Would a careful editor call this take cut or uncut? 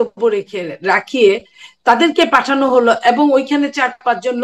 uncut